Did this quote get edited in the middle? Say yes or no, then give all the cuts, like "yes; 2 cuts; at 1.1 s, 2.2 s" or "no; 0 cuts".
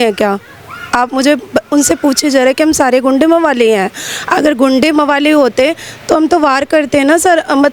no; 0 cuts